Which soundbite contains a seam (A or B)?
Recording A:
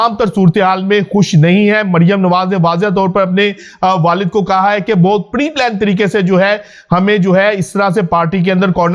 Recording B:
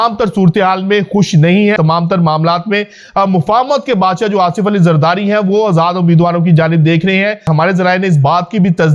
B